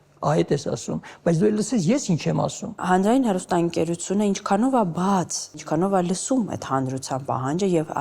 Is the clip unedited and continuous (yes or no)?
no